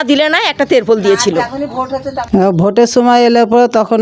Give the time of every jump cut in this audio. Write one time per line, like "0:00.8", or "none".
0:02.1